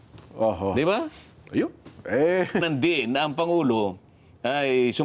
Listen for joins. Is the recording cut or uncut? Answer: cut